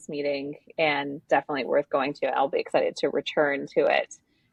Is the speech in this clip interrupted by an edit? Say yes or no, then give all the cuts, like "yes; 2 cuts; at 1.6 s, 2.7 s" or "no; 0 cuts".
no; 0 cuts